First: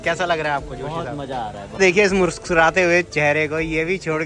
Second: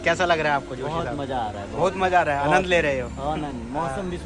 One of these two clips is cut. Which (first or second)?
first